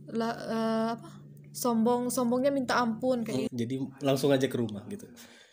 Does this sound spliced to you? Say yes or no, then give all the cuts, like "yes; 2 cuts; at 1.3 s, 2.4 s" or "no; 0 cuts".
yes; 1 cut; at 3.5 s